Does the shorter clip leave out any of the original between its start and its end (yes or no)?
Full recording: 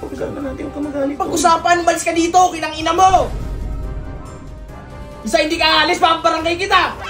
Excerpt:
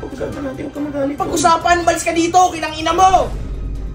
no